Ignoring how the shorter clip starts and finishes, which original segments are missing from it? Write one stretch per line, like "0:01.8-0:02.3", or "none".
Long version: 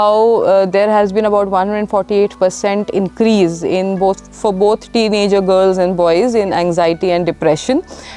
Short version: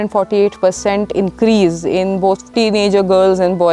0:04.2-0:04.8